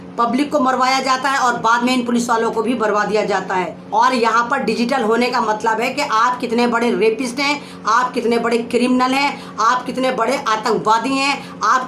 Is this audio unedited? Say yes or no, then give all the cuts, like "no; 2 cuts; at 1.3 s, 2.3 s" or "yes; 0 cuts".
no; 1 cut; at 3.8 s